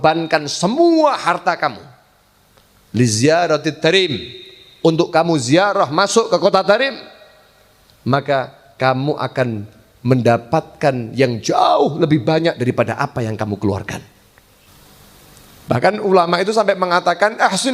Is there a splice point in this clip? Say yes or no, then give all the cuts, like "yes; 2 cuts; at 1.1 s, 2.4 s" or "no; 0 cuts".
yes; 1 cut; at 14.7 s